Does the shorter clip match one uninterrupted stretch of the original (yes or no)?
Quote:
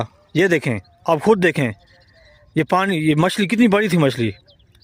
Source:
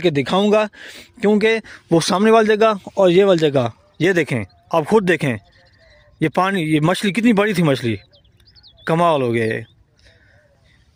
yes